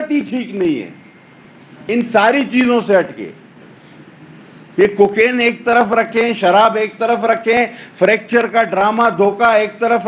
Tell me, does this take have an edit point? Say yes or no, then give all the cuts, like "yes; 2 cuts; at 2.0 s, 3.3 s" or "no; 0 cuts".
no; 0 cuts